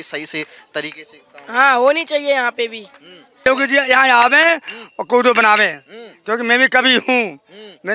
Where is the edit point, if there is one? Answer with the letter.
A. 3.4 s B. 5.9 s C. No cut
A